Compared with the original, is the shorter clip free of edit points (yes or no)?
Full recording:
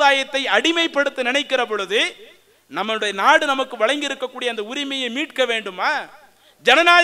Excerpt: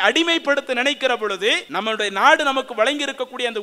no